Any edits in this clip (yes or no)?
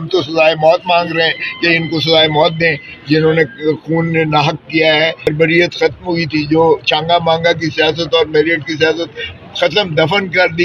yes